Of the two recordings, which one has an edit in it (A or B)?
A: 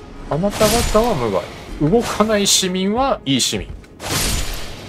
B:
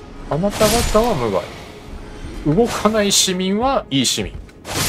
A